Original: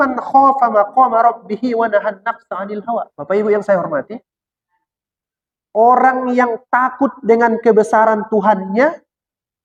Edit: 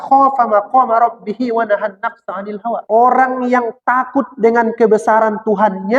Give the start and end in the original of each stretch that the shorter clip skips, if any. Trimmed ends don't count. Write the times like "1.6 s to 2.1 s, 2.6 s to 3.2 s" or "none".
3.1 s to 5.7 s